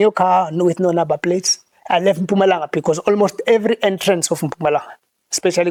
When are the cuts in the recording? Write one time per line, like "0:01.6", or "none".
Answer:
none